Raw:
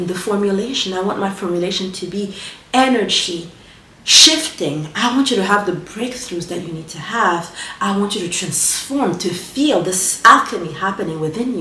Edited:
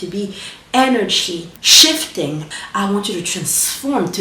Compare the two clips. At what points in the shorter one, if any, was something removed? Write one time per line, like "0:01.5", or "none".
0:01.6
0:02.5